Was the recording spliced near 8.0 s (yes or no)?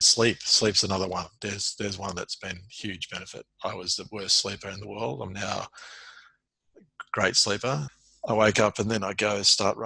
yes